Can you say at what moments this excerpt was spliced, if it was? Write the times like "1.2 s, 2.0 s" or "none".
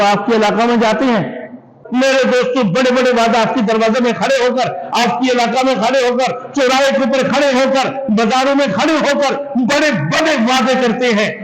1.8 s